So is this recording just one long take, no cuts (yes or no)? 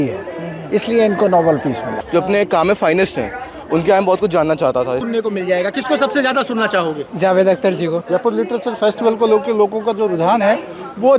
no